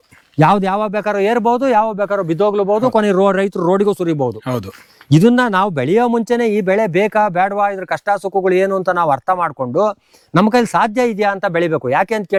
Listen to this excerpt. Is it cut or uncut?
uncut